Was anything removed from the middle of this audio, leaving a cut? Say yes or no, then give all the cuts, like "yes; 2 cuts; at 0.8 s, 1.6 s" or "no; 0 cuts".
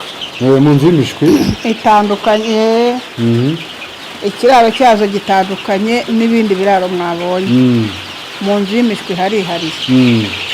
no; 0 cuts